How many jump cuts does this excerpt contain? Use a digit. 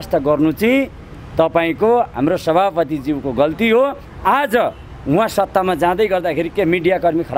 1